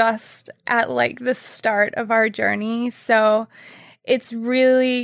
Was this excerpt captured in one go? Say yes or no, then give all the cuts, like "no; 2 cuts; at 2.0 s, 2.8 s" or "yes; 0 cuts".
yes; 0 cuts